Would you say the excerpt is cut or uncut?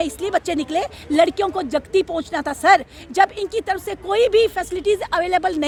uncut